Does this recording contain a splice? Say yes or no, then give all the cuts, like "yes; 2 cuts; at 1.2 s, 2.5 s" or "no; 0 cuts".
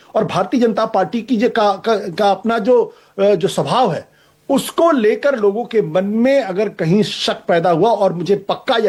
no; 0 cuts